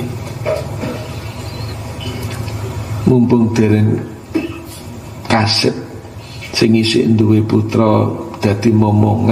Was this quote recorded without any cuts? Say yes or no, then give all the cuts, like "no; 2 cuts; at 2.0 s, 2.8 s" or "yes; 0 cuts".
yes; 0 cuts